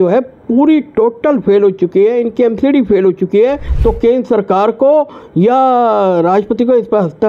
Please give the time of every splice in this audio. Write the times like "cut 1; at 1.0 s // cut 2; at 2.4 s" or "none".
cut 1; at 3.7 s